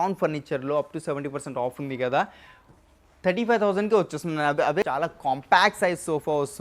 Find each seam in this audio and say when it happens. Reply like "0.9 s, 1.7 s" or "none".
4.8 s